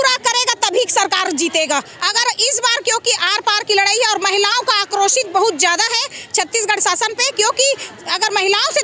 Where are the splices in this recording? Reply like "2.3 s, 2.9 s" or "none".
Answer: none

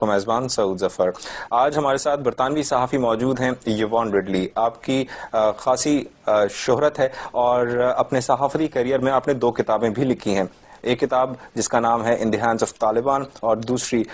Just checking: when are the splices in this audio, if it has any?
none

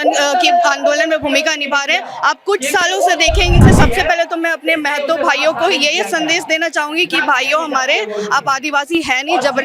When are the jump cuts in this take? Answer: 3.6 s

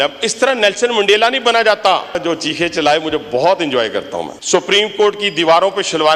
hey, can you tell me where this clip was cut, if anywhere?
2.2 s, 4.2 s

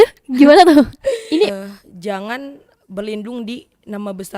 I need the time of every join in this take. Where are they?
1.5 s

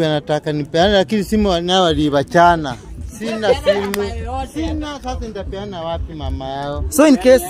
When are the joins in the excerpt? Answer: none

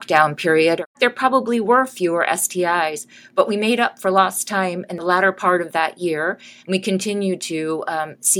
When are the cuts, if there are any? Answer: 0.9 s, 4.9 s

